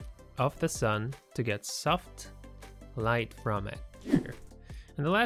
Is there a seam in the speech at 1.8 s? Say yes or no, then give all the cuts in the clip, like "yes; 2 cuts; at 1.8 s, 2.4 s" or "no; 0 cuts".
no; 1 cut; at 4.2 s